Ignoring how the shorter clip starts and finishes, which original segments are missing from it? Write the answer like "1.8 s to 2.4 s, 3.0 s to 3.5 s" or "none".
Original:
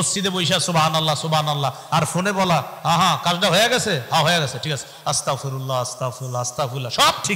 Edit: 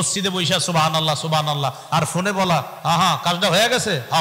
none